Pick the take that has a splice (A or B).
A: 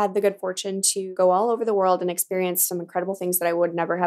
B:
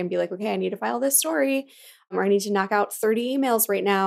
A